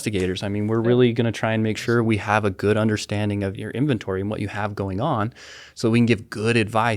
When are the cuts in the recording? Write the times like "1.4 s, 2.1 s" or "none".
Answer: 3.5 s